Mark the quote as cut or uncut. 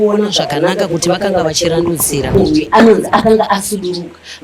cut